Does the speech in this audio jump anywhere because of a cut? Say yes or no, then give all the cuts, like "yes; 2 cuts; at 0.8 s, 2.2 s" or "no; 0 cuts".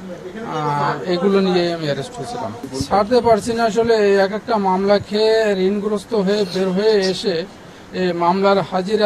yes; 1 cut; at 2.6 s